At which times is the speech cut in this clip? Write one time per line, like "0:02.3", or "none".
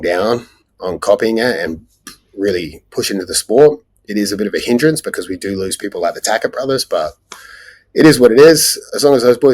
none